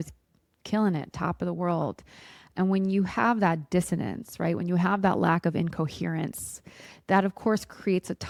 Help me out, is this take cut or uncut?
uncut